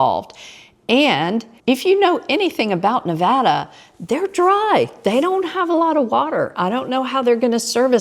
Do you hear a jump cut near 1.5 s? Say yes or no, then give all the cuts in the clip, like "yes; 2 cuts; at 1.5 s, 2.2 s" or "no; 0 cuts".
yes; 1 cut; at 1.5 s